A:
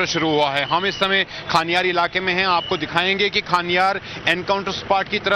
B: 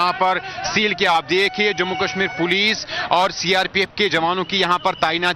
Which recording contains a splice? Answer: B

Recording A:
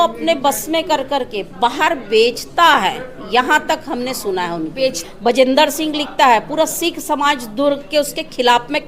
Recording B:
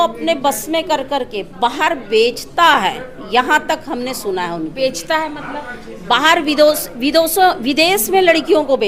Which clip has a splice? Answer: A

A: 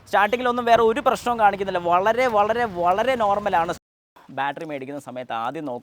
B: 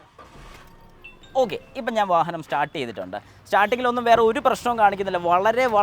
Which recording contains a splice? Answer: A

